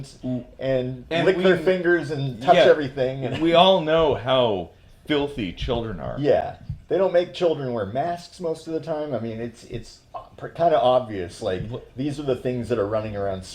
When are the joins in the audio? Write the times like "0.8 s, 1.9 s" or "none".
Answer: none